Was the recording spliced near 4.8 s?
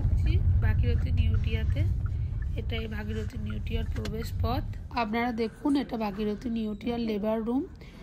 yes; 1 cut; at 4.8 s

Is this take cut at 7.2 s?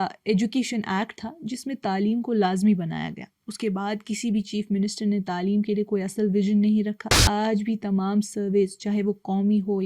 yes; 1 cut; at 7.2 s

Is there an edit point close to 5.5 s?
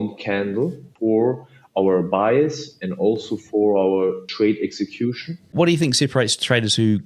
yes; 3 cuts; at 0.9 s, 4.2 s, 5.5 s

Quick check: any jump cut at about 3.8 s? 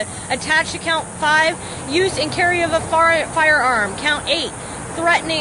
yes; 1 cut; at 3.8 s

